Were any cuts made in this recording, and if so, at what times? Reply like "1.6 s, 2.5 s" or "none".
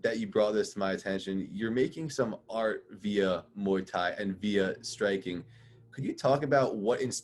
none